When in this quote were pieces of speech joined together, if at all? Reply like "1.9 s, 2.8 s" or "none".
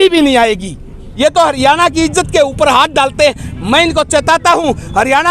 1.0 s